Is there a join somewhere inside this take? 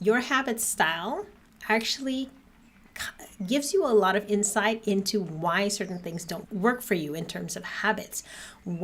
no; 0 cuts

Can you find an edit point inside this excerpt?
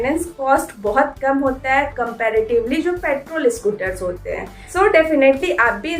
yes; 1 cut; at 4.7 s

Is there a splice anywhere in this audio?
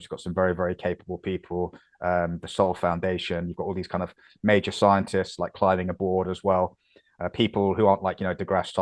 no; 0 cuts

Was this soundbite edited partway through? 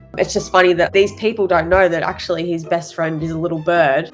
no; 0 cuts

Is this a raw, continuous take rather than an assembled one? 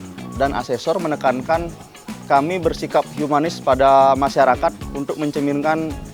no; 1 cut; at 4.9 s

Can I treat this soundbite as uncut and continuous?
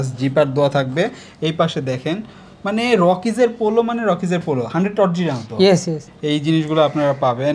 yes; 0 cuts

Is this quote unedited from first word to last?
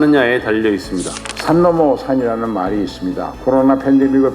no; 1 cut; at 1.3 s

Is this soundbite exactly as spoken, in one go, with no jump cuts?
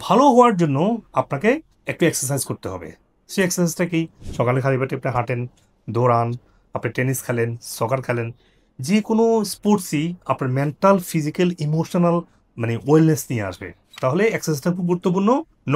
yes; 0 cuts

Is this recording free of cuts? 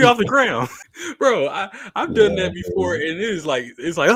yes; 0 cuts

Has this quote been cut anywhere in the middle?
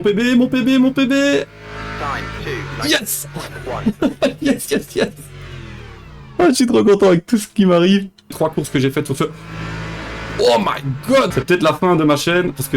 yes; 2 cuts; at 8.3 s, 11.3 s

